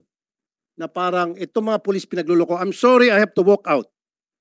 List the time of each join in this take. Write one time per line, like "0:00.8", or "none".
none

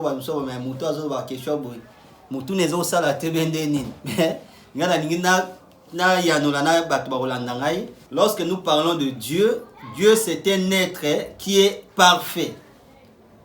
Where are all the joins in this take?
0:08.0

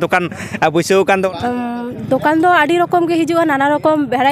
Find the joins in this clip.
0:01.3

